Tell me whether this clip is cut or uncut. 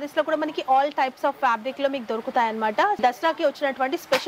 cut